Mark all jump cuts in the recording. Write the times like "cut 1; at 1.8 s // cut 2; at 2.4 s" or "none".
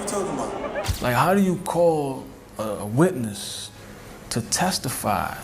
cut 1; at 0.9 s